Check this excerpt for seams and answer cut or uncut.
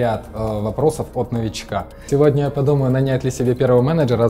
cut